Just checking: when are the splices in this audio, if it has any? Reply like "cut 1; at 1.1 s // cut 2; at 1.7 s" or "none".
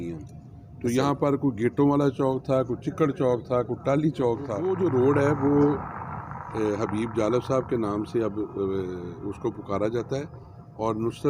cut 1; at 4.7 s